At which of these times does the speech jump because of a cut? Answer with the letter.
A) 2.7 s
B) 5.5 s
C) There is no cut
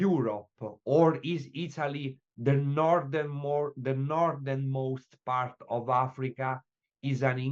C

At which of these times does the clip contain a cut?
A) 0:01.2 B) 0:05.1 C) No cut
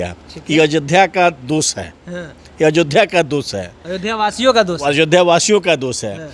C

